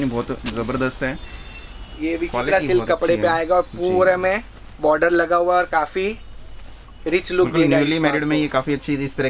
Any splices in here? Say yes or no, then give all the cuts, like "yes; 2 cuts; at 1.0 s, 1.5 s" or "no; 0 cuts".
no; 0 cuts